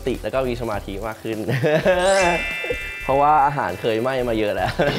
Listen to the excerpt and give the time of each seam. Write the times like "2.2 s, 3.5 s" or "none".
none